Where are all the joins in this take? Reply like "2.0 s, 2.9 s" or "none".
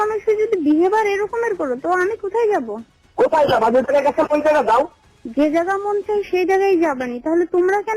none